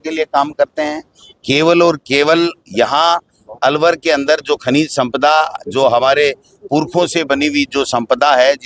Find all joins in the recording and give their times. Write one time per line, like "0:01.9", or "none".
none